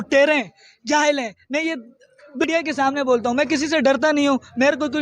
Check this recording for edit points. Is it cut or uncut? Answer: cut